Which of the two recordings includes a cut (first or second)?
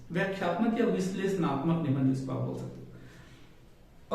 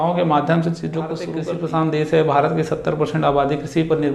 second